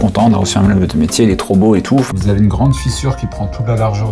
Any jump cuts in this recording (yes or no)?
yes